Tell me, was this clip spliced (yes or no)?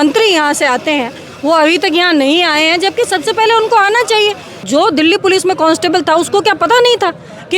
yes